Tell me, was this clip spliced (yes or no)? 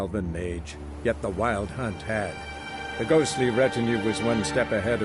no